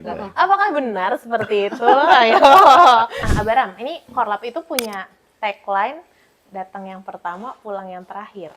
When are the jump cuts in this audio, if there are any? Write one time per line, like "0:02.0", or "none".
0:03.2